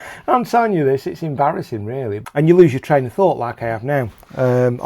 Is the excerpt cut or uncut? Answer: cut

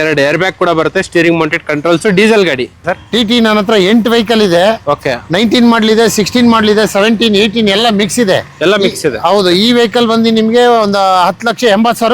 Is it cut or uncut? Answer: cut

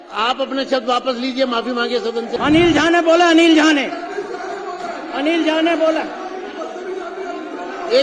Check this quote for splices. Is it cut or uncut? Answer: cut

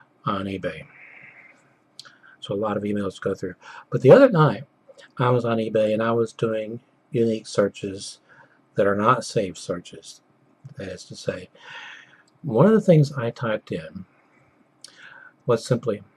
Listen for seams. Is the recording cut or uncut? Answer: uncut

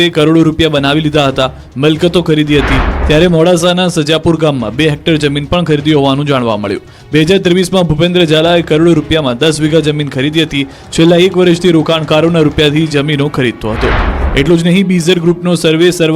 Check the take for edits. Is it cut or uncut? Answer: cut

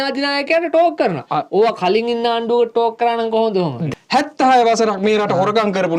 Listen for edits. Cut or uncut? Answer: cut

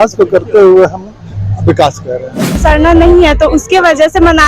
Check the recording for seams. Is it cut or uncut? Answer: cut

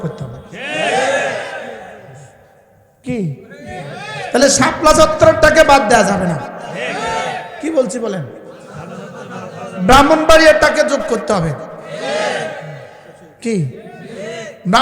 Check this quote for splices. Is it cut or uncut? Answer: uncut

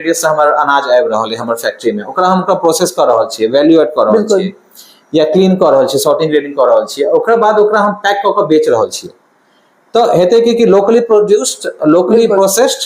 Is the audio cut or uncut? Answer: uncut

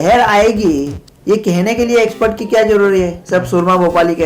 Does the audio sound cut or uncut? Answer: uncut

